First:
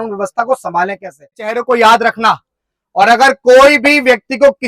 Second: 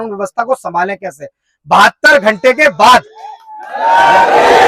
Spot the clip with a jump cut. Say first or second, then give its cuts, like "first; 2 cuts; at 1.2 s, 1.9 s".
first; 1 cut; at 1.5 s